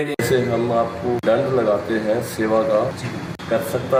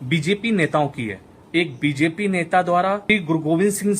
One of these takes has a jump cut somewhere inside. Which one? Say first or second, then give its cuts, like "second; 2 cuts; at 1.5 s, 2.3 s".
second; 2 cuts; at 1.5 s, 3.0 s